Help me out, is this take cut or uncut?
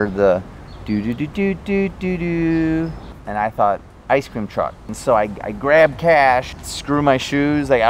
cut